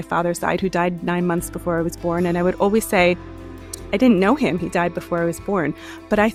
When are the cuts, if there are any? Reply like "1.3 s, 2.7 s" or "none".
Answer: none

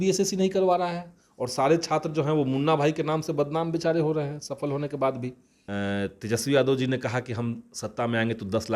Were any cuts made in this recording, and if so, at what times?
5.5 s

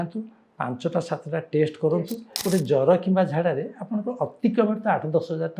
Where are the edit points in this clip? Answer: 2.2 s

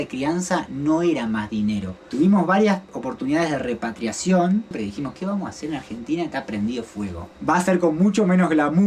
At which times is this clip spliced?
2.1 s, 4.7 s, 7.2 s

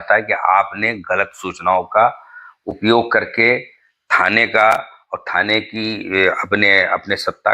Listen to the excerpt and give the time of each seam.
none

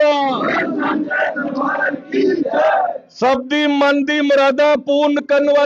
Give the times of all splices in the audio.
none

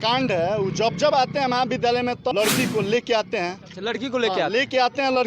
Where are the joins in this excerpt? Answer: 2.3 s

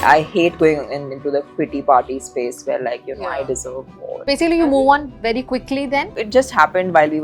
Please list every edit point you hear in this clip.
4.2 s, 6.2 s

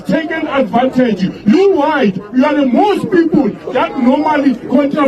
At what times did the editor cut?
none

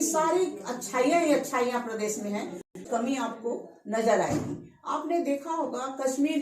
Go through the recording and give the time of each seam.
2.8 s

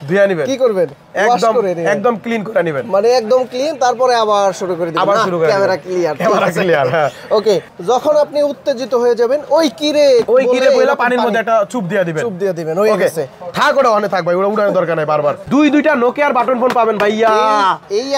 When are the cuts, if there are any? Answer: 7.7 s, 15.4 s

